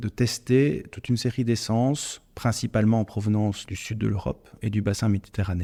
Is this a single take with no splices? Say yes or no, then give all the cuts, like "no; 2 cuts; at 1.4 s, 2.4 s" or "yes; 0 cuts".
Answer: yes; 0 cuts